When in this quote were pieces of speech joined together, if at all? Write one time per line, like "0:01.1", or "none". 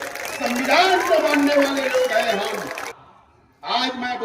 0:02.9